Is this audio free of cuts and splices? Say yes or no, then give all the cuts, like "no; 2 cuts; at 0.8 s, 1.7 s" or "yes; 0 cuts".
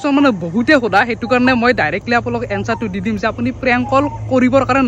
yes; 0 cuts